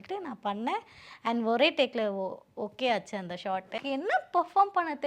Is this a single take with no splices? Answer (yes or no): no